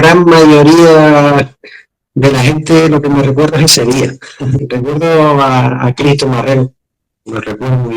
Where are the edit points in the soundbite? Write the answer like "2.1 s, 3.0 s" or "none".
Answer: 4.7 s